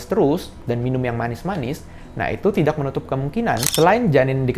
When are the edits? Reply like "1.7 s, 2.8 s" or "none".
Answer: 3.7 s